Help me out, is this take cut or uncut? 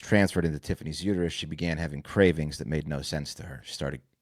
uncut